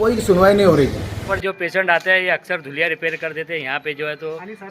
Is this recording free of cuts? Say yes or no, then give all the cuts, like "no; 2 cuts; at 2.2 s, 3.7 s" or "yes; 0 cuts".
no; 1 cut; at 1.3 s